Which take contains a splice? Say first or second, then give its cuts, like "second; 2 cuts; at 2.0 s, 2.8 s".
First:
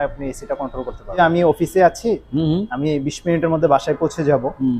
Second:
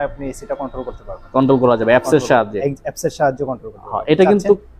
first; 1 cut; at 1.2 s